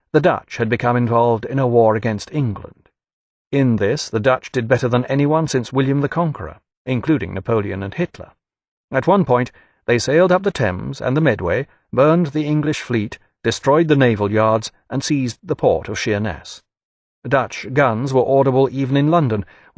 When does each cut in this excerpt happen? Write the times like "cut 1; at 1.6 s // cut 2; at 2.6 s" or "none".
cut 1; at 2.2 s